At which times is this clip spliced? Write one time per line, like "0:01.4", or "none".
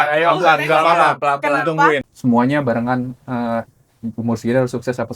0:02.0